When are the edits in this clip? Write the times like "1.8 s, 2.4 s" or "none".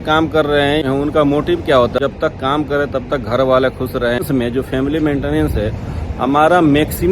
0.8 s, 2.0 s, 4.2 s